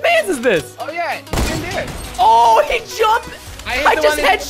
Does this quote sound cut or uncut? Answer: uncut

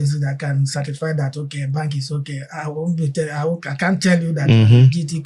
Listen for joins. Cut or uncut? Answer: uncut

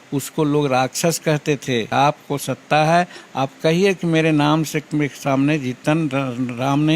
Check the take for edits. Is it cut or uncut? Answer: cut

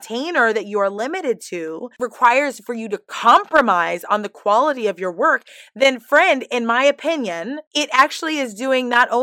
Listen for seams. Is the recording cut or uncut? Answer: cut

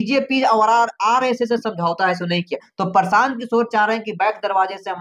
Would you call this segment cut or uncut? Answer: uncut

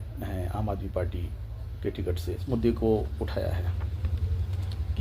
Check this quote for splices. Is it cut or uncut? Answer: cut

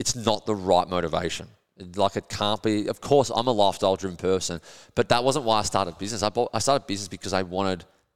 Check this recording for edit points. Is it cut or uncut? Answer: uncut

